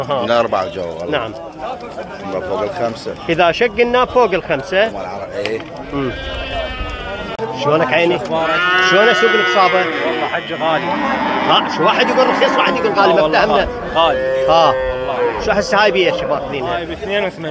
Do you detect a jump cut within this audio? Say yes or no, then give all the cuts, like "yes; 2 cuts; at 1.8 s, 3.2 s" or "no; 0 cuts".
yes; 1 cut; at 7.3 s